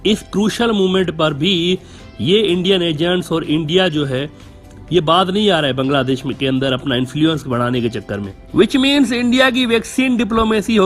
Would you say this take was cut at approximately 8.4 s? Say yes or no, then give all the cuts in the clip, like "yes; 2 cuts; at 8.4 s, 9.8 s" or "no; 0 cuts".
yes; 1 cut; at 8.4 s